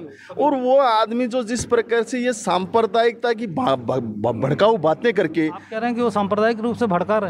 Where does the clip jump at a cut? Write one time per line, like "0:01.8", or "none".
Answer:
none